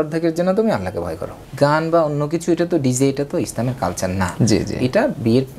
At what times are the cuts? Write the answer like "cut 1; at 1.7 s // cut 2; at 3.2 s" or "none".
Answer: cut 1; at 1.5 s

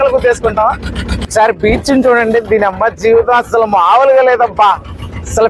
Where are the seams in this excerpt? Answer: cut 1; at 1.3 s

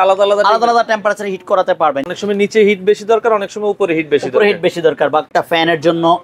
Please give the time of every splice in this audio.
cut 1; at 2.0 s // cut 2; at 5.3 s

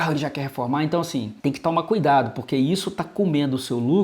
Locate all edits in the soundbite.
cut 1; at 1.3 s

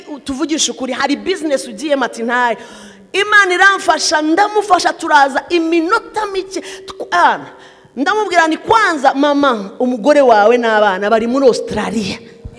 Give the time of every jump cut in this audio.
none

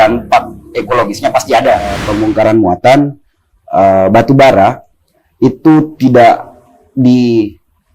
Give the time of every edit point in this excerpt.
cut 1; at 2.1 s

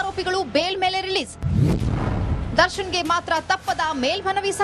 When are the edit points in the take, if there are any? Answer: none

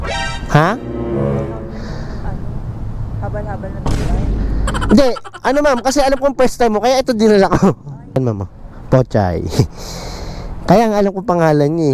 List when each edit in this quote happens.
cut 1; at 8.2 s

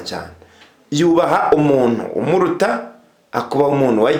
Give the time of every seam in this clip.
none

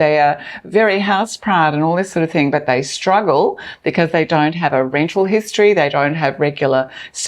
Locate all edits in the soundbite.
none

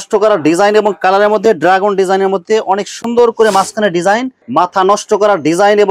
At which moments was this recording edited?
cut 1; at 4.4 s

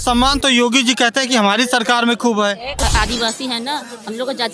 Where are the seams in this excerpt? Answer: cut 1; at 2.8 s

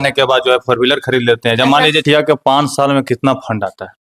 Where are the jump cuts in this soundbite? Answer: cut 1; at 2.0 s

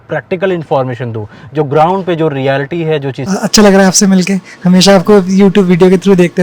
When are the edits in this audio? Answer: cut 1; at 3.2 s

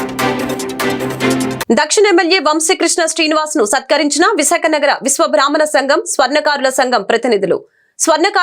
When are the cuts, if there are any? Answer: cut 1; at 1.6 s

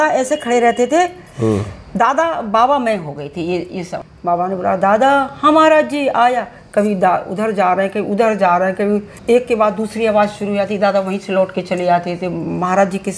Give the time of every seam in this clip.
cut 1; at 4.0 s // cut 2; at 9.1 s

